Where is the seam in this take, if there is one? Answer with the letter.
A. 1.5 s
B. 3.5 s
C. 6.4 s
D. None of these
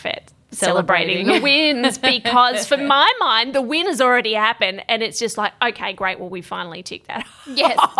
D